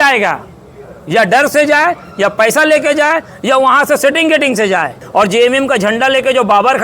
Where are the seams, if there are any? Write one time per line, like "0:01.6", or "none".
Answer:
0:05.0